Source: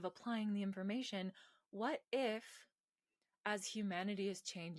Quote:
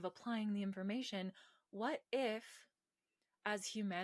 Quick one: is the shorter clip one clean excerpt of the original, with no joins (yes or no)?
yes